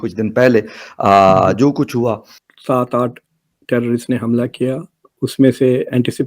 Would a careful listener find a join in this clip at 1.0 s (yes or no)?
no